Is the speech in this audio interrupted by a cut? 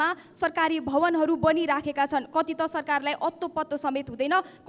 no; 0 cuts

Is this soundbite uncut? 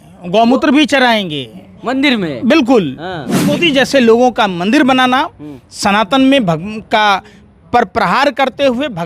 no; 1 cut; at 3.5 s

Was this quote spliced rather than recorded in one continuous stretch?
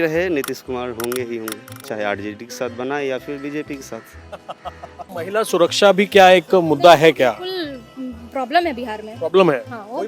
yes; 1 cut; at 5.0 s

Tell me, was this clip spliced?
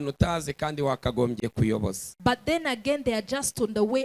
no; 0 cuts

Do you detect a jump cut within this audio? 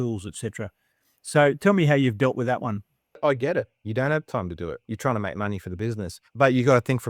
yes; 3 cuts; at 3.2 s, 4.8 s, 6.2 s

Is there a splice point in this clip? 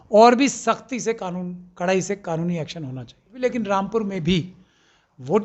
yes; 1 cut; at 3.3 s

